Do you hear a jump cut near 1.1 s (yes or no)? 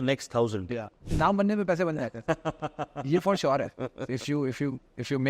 yes